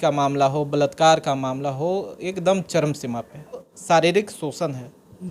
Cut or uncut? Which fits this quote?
cut